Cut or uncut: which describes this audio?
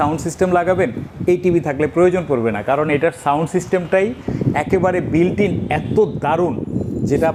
uncut